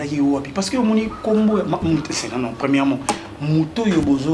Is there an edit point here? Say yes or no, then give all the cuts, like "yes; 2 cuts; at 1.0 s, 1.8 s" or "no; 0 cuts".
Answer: no; 0 cuts